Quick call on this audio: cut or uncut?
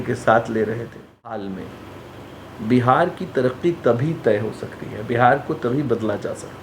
cut